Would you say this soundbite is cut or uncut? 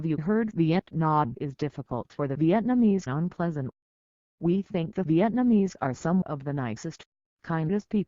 cut